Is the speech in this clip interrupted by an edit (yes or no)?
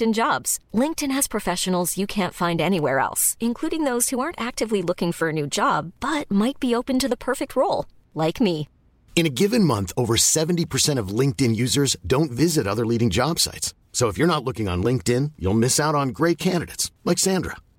no